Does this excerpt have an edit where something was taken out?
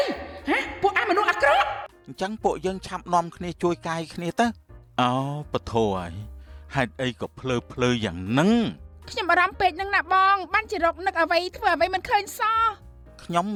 no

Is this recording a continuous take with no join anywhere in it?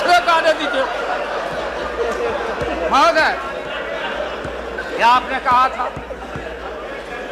yes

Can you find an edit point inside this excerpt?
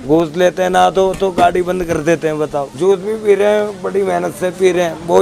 yes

